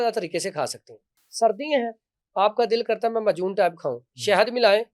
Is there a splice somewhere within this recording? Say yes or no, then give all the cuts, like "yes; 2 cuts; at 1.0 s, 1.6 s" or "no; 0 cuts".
no; 0 cuts